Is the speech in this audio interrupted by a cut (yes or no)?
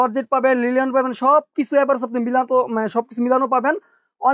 no